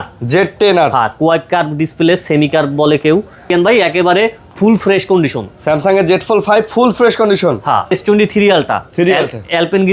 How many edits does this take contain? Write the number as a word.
two